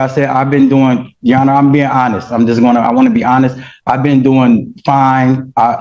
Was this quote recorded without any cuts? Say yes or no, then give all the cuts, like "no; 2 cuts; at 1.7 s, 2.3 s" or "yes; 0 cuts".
yes; 0 cuts